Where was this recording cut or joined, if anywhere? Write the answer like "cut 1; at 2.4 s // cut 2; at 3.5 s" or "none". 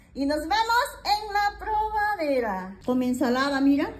cut 1; at 2.7 s